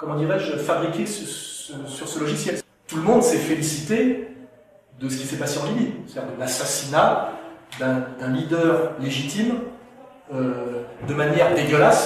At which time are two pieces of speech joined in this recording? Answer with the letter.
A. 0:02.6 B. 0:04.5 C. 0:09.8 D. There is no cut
A